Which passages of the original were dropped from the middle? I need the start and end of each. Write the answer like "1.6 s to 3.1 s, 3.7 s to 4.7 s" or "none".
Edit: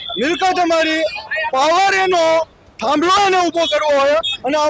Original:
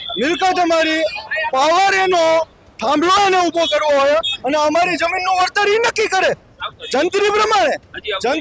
none